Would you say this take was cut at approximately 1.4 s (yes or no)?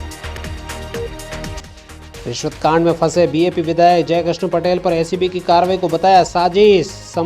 yes